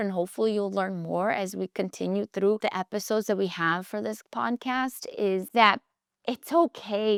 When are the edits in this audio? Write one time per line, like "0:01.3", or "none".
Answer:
none